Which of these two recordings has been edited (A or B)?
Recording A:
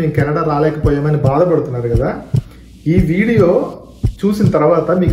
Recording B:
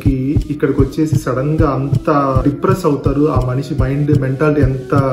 B